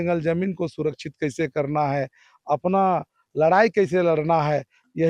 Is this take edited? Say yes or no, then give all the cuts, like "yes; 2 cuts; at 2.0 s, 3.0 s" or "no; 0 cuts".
no; 0 cuts